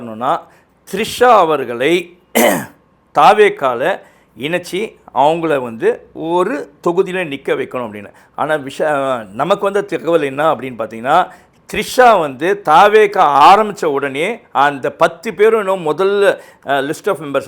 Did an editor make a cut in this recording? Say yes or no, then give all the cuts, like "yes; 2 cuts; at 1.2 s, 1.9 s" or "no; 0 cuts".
no; 0 cuts